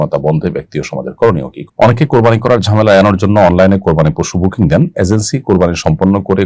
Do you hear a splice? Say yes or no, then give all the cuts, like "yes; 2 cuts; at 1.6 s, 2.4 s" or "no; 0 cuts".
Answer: yes; 1 cut; at 1.6 s